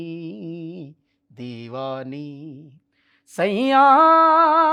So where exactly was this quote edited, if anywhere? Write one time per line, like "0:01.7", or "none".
none